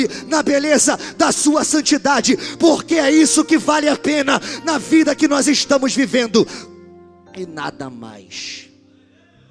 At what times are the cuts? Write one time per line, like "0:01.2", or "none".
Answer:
none